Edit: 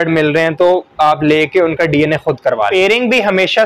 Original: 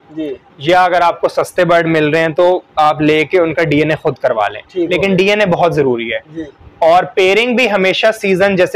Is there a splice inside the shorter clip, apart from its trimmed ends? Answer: yes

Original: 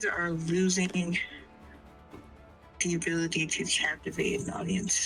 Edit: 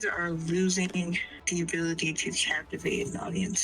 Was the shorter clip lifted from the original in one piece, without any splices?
no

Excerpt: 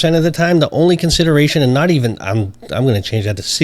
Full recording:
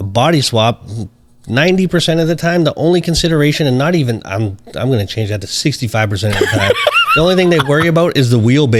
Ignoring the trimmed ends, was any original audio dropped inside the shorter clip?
no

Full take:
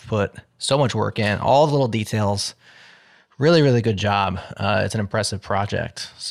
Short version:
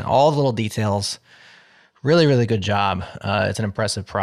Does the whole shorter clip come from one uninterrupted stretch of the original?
yes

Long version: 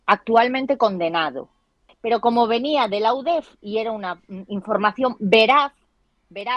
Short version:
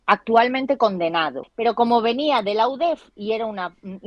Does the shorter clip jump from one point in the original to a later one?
yes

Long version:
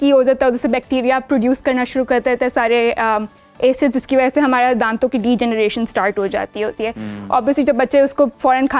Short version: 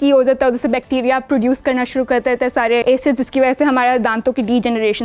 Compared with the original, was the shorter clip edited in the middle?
yes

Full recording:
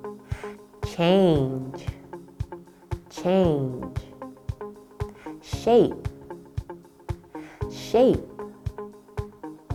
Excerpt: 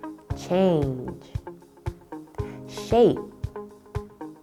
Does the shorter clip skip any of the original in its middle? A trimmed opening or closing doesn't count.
no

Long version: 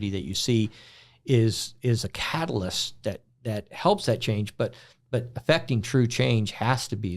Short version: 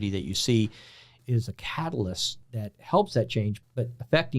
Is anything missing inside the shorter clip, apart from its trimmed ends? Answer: yes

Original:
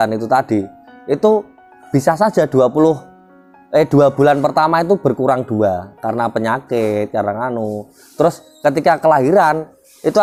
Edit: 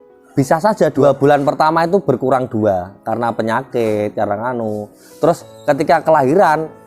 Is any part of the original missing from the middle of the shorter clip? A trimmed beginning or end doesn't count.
yes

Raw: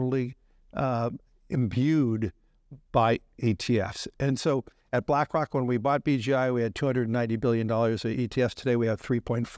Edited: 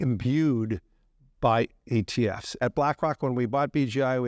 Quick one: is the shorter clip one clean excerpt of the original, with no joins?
no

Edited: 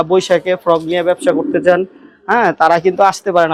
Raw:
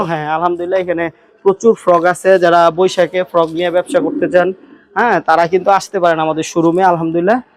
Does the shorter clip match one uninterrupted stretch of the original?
yes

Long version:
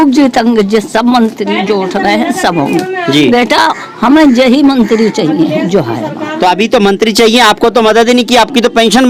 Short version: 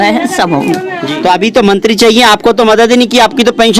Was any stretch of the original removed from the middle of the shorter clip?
yes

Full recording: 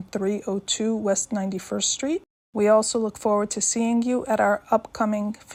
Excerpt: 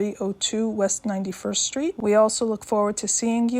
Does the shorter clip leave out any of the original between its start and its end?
yes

